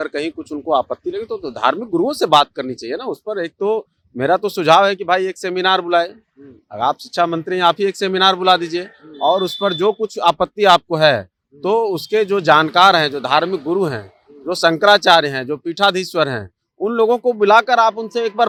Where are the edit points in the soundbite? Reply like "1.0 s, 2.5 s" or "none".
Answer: none